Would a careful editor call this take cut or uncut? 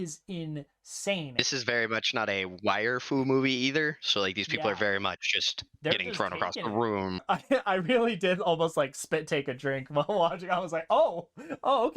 cut